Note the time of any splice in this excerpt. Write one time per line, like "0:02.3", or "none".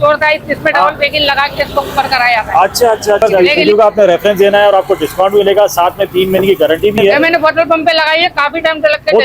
0:03.3
0:07.1